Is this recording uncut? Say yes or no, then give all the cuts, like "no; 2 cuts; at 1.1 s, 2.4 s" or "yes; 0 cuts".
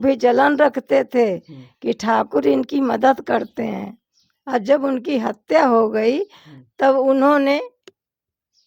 yes; 0 cuts